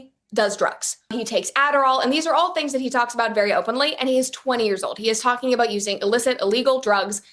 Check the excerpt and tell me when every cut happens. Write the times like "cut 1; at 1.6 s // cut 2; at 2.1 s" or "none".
none